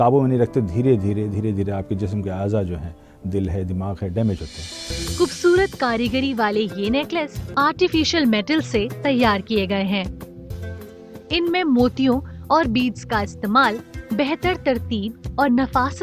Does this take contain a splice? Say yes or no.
yes